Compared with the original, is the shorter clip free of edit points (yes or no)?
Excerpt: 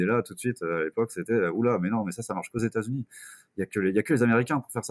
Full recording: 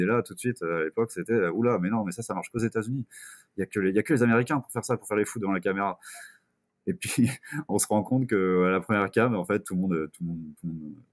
yes